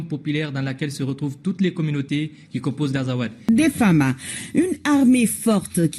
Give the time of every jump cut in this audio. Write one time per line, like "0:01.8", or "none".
0:03.4